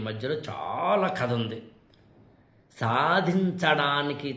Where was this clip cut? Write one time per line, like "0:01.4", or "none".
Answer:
none